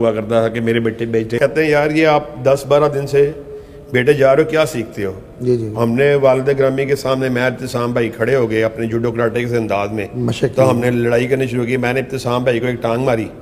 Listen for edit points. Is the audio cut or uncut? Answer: cut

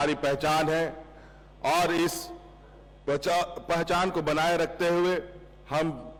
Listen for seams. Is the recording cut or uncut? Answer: uncut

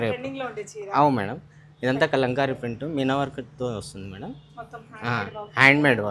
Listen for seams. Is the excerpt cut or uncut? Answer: uncut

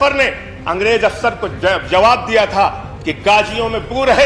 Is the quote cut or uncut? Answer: uncut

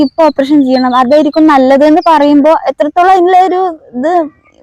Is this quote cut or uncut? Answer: uncut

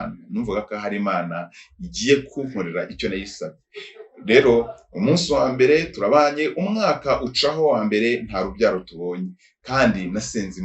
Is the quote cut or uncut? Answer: uncut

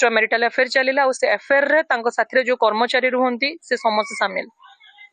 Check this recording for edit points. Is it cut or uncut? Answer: uncut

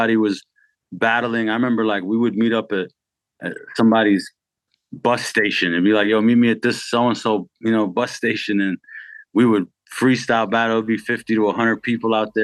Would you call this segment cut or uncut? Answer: uncut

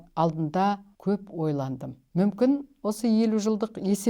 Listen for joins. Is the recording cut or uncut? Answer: cut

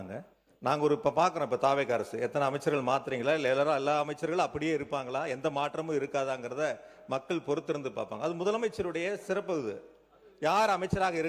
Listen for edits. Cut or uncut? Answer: uncut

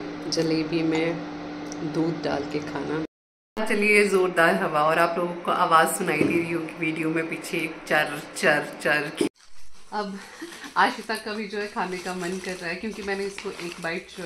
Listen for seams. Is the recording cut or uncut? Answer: cut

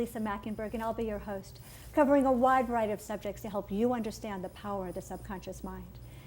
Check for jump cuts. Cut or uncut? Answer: cut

